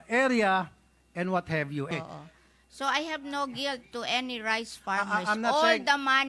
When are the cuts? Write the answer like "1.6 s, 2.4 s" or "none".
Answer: 1.9 s